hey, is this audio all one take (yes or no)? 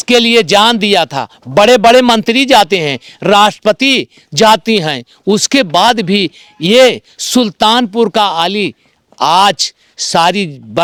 yes